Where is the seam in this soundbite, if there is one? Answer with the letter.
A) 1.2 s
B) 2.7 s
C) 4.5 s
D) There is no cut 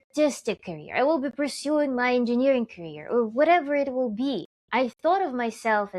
C